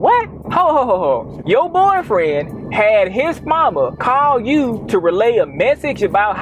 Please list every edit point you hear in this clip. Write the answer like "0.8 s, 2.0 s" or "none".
4.0 s